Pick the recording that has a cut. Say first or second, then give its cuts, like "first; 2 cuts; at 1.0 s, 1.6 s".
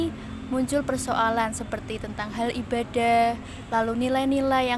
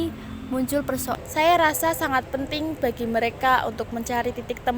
second; 1 cut; at 1.2 s